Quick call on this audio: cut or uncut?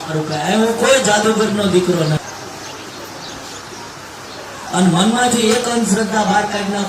cut